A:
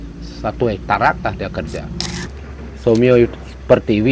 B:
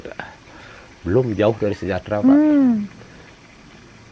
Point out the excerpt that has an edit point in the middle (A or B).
A